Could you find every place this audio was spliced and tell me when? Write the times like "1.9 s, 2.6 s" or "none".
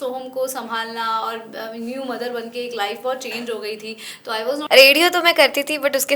4.6 s